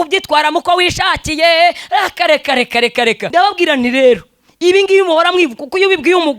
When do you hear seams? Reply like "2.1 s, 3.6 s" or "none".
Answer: 3.2 s